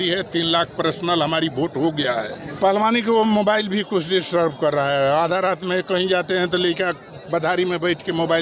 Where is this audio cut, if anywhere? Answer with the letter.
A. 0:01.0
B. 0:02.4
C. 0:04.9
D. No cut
B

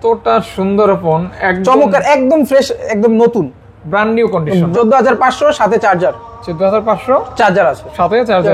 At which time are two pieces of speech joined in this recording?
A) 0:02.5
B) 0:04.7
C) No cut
B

